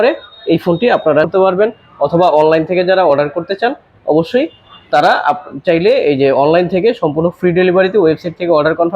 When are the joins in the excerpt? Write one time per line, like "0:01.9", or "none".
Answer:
0:01.3